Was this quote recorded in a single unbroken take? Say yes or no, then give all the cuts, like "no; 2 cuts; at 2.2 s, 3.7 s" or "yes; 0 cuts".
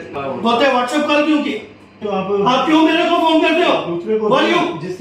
no; 1 cut; at 2.1 s